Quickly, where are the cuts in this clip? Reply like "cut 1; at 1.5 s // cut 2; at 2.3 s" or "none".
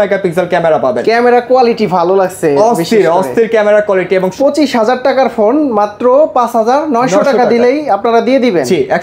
cut 1; at 4.3 s

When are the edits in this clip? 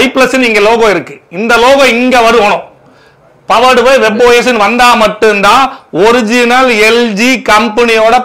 none

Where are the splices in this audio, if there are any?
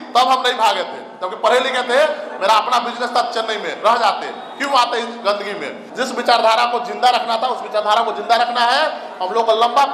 cut 1; at 5.8 s

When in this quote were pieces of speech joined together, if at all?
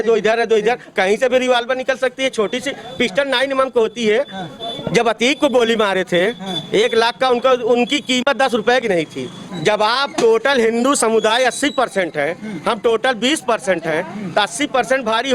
cut 1; at 9.5 s

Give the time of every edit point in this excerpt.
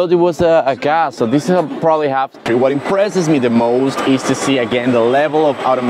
cut 1; at 2.4 s

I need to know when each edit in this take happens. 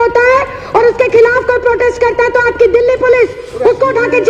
none

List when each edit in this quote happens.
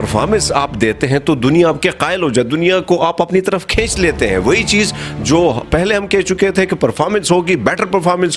none

